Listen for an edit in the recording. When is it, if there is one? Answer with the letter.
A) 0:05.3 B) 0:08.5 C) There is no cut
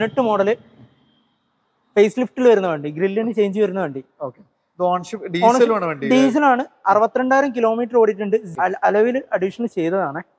B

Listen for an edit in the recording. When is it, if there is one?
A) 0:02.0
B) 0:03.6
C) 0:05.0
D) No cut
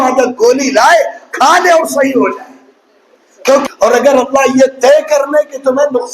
B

